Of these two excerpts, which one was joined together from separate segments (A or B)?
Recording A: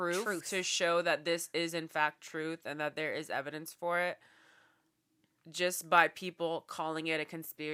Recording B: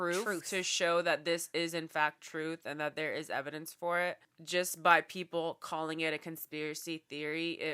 B